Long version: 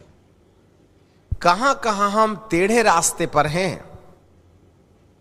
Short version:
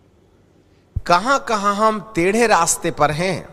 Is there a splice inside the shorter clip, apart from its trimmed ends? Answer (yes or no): yes